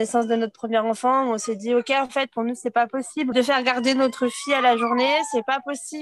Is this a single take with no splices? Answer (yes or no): no